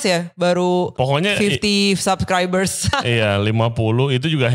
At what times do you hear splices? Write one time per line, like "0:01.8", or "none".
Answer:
0:00.9
0:02.8